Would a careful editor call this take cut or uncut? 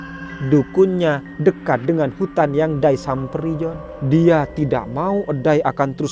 cut